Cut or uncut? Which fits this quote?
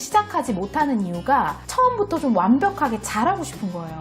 cut